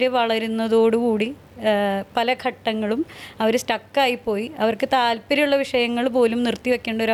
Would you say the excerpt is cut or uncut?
uncut